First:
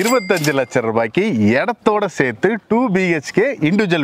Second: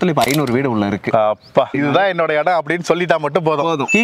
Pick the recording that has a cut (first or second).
second